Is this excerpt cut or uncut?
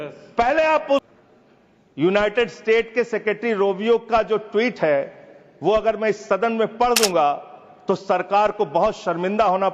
cut